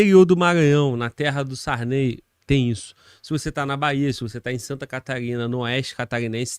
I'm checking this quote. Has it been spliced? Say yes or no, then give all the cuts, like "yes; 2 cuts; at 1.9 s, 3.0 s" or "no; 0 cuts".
no; 0 cuts